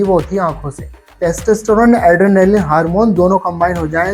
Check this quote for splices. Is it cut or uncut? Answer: cut